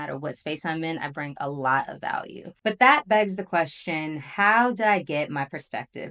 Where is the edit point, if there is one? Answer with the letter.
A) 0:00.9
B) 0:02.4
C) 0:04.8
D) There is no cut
B